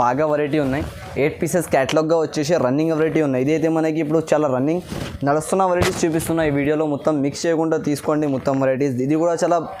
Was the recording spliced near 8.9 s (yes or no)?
no